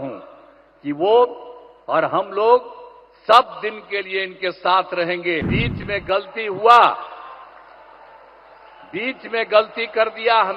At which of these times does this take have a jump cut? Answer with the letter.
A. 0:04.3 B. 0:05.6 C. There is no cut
B